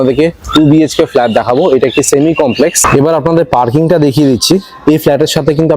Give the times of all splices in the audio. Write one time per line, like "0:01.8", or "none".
0:02.8